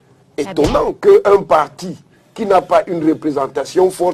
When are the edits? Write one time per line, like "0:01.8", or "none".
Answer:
none

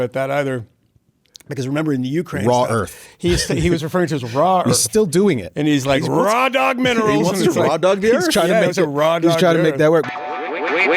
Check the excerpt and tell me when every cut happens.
0:10.0

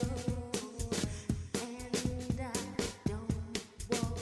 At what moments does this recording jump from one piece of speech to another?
none

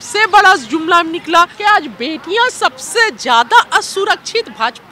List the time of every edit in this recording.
0:01.5

